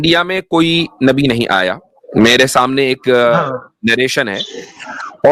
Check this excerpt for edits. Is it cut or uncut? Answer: uncut